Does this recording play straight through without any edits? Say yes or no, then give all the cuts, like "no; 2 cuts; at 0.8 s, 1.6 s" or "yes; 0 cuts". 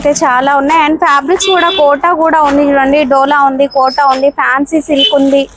yes; 0 cuts